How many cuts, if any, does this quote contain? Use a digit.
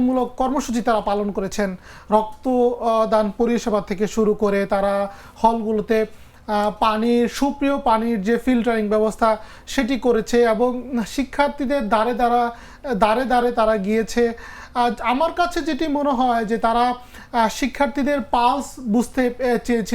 0